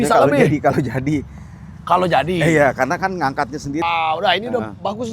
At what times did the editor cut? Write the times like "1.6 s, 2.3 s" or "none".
3.8 s